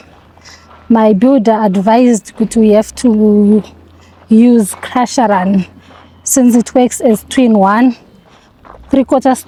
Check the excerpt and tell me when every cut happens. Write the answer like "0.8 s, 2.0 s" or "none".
none